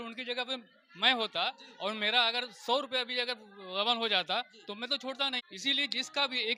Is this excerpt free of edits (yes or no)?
yes